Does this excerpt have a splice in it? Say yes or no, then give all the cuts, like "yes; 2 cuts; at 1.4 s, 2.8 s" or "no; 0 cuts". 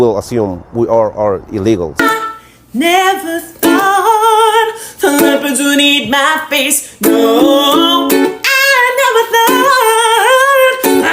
yes; 1 cut; at 2.0 s